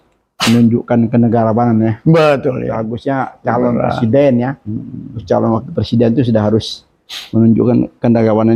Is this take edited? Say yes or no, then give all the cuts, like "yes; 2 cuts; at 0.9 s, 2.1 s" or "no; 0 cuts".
no; 0 cuts